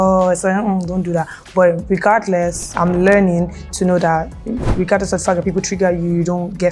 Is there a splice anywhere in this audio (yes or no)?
yes